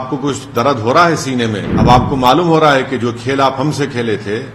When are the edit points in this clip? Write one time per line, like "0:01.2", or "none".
0:01.7